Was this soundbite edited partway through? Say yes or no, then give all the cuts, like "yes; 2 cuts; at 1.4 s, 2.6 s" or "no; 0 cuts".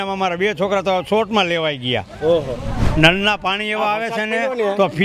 yes; 1 cut; at 2.8 s